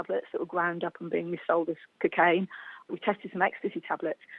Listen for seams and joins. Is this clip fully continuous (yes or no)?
no